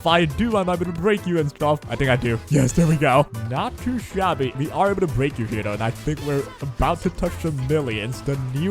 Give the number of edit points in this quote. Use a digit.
3